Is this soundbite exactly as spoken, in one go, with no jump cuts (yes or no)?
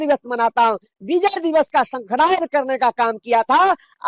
yes